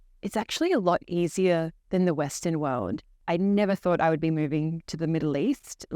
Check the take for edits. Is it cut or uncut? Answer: cut